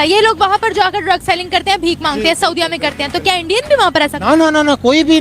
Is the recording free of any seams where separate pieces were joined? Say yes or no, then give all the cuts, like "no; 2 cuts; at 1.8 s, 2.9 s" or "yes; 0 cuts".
yes; 0 cuts